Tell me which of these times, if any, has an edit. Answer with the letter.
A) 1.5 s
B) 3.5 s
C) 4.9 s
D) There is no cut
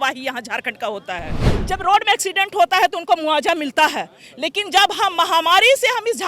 A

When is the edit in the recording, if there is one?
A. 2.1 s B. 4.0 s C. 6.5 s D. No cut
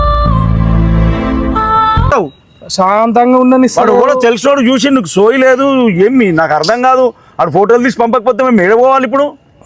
A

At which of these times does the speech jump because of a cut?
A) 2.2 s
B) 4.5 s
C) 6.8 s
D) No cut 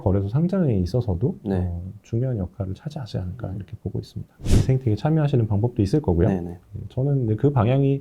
B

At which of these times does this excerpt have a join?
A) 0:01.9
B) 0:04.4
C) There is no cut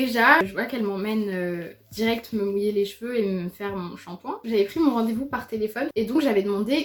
C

